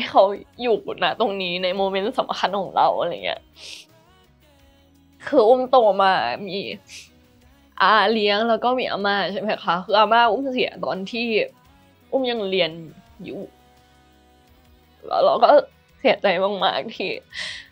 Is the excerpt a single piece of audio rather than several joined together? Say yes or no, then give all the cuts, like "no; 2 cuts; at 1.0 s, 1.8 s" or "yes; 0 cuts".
yes; 0 cuts